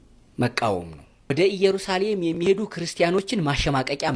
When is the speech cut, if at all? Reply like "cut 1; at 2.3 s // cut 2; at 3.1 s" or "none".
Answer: cut 1; at 1.3 s

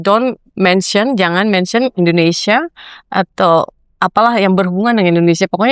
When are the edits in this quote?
none

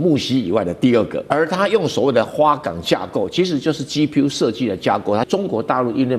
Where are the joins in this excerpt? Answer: cut 1; at 1.2 s // cut 2; at 5.3 s

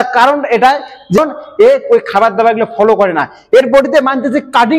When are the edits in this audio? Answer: cut 1; at 1.2 s

